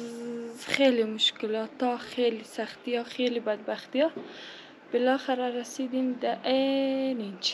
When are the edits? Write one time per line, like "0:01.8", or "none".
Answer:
none